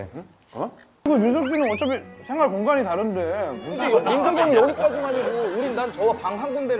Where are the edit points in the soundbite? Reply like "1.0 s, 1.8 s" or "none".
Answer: 1.1 s